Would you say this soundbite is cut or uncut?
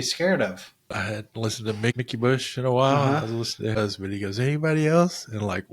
cut